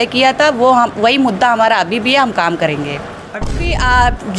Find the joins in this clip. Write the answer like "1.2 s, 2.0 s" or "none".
3.5 s